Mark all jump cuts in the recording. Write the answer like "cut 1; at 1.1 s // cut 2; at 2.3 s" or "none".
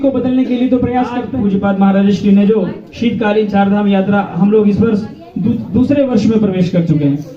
cut 1; at 1.3 s